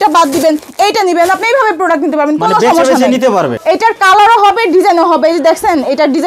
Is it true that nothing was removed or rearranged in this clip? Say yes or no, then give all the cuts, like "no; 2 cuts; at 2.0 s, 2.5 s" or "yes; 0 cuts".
no; 1 cut; at 3.5 s